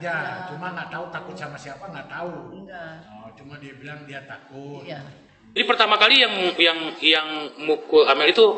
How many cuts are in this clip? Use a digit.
1